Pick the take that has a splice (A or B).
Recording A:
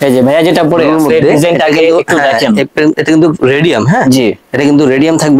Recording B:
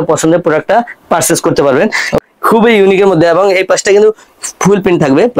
B